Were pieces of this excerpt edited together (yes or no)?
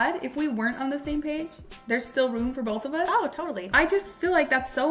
no